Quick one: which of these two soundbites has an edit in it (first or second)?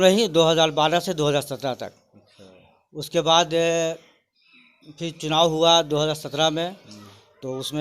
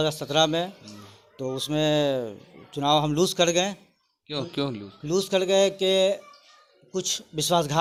first